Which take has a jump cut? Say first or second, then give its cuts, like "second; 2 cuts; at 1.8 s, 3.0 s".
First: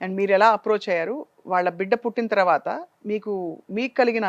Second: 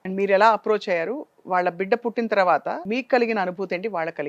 second; 1 cut; at 2.8 s